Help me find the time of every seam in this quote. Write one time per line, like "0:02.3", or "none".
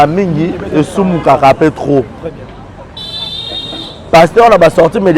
none